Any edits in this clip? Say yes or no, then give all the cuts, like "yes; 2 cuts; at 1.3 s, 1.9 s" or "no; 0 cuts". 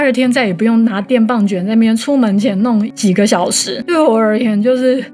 no; 0 cuts